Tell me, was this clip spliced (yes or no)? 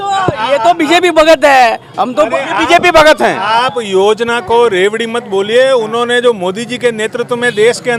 no